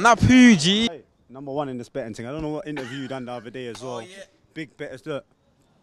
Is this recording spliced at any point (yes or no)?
yes